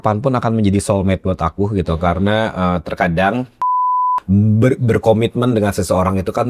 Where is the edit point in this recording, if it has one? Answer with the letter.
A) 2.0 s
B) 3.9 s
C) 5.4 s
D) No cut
B